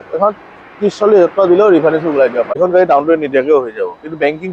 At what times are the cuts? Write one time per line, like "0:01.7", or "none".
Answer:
0:02.6